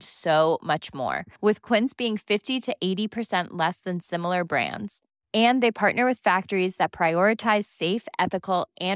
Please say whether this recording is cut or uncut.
uncut